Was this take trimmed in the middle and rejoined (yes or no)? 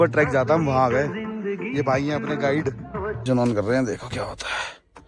no